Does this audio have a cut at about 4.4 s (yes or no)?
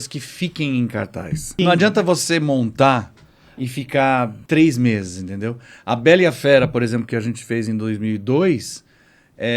yes